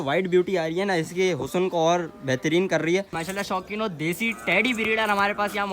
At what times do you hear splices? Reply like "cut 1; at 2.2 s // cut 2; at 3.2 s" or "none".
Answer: cut 1; at 3.1 s